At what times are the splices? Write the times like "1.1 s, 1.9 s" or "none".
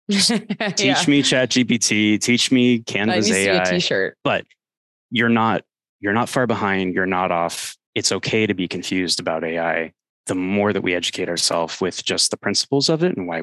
4.1 s